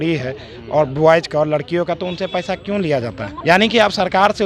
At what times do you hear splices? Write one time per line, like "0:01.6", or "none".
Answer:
0:03.3